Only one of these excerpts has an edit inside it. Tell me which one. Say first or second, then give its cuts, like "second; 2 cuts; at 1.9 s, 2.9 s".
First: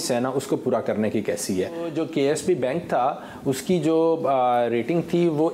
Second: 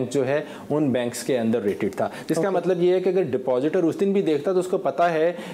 first; 1 cut; at 1.9 s